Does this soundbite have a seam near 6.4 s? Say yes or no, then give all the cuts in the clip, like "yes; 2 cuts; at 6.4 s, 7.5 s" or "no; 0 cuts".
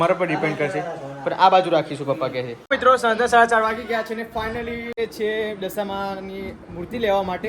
no; 2 cuts; at 2.6 s, 5.0 s